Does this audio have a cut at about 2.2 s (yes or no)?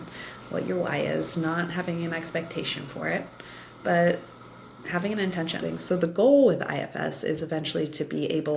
no